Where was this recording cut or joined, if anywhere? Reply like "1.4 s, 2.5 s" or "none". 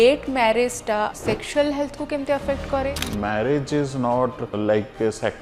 1.2 s, 2.9 s, 4.5 s

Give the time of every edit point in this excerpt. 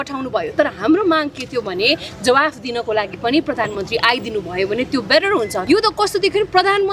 5.6 s

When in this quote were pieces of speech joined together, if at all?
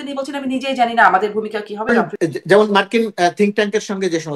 1.9 s

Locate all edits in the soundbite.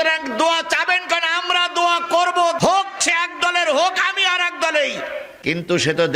2.6 s, 5.3 s

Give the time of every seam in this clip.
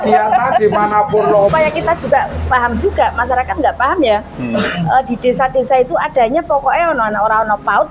1.5 s

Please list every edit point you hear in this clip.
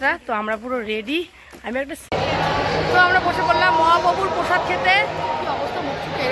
2.0 s

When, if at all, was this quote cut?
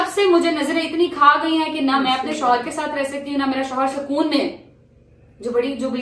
none

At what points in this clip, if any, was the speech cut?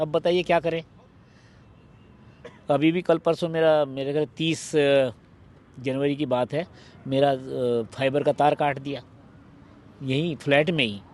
none

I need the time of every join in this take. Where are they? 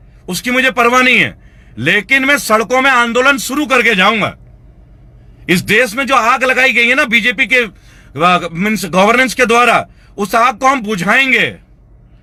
none

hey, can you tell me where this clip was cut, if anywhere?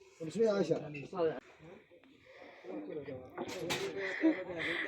1.4 s

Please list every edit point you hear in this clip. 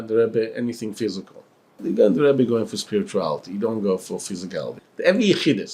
1.8 s, 4.7 s

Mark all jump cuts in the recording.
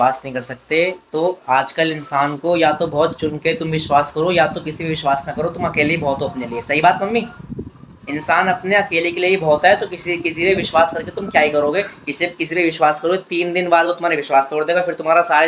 none

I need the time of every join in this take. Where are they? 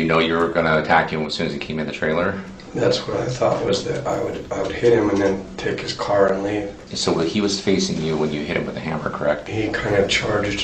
6.9 s, 9.5 s

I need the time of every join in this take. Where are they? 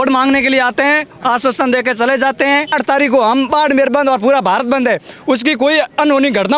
2.7 s

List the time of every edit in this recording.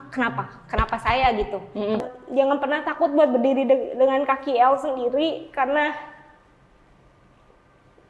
2.0 s

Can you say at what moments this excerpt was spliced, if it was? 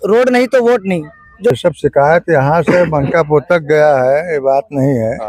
1.5 s

